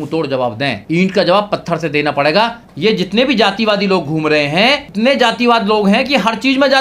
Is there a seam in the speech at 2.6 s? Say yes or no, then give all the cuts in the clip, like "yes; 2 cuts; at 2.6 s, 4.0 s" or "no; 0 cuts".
yes; 3 cuts; at 0.8 s, 2.6 s, 4.9 s